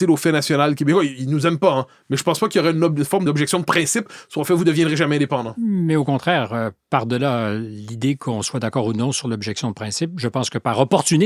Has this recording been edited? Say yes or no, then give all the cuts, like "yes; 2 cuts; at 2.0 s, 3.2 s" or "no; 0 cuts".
yes; 1 cut; at 3.2 s